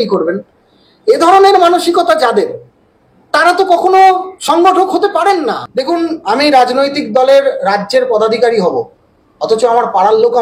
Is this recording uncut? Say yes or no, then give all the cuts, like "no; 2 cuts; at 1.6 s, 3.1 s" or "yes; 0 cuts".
no; 1 cut; at 5.7 s